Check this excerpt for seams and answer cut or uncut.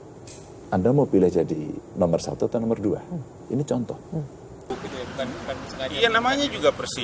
cut